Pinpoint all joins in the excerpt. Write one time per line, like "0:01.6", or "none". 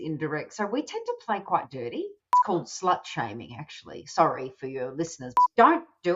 0:02.4
0:05.2